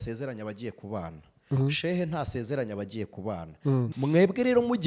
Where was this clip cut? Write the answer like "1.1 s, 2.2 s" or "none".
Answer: 3.9 s